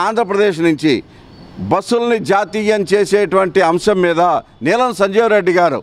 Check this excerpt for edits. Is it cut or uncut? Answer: uncut